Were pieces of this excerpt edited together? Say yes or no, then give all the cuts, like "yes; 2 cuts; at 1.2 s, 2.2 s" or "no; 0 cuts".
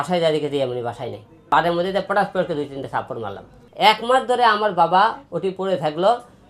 yes; 2 cuts; at 1.4 s, 3.6 s